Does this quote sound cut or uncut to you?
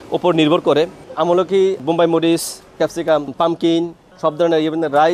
cut